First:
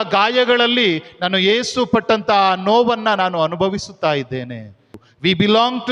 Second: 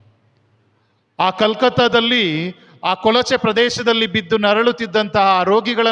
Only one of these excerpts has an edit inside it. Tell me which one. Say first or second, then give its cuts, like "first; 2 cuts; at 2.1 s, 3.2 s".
first; 1 cut; at 5.0 s